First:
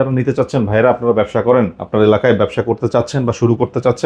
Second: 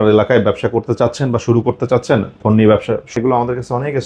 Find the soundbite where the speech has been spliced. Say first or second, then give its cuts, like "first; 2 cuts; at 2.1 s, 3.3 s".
second; 1 cut; at 3.1 s